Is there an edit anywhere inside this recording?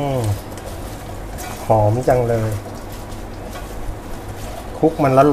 no; 0 cuts

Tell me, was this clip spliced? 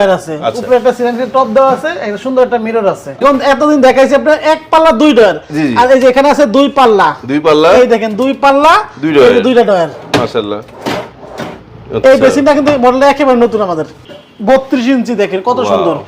yes; 2 cuts; at 3.2 s, 14.0 s

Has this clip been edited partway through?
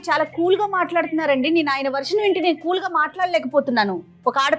no; 0 cuts

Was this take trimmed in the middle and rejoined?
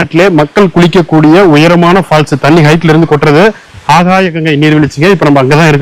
no; 0 cuts

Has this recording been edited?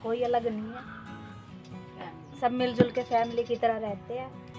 yes; 2 cuts; at 0.8 s, 2.0 s

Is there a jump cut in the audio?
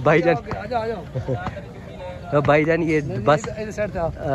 no; 0 cuts

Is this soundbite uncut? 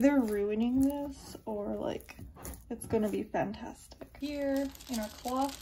no; 1 cut; at 4.1 s

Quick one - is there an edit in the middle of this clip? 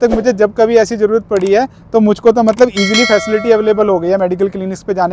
no; 0 cuts

